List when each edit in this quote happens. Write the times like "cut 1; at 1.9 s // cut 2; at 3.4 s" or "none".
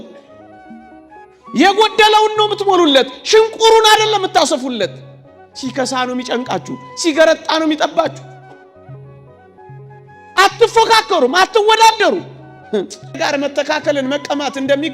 cut 1; at 13.2 s